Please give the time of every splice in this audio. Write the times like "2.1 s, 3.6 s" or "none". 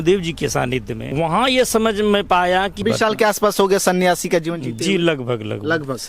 1.1 s, 2.8 s